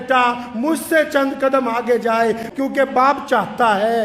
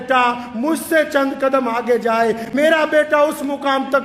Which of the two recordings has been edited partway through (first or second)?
first